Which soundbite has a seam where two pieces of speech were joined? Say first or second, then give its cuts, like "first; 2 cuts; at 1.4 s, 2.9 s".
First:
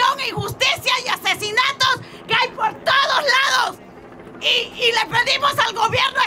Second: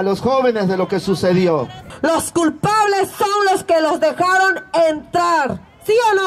second; 1 cut; at 1.9 s